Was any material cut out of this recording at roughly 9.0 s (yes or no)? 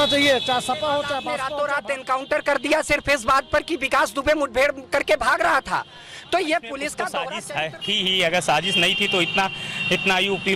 no